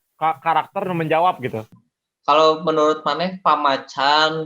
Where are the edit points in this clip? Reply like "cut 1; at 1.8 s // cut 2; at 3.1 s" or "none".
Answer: cut 1; at 1.7 s